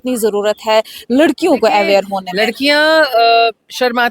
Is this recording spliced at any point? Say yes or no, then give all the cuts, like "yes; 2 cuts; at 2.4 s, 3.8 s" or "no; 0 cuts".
yes; 1 cut; at 2.2 s